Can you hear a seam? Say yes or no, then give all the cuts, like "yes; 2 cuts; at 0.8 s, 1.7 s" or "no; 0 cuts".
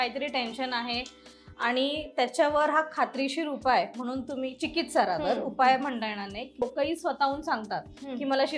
yes; 1 cut; at 6.6 s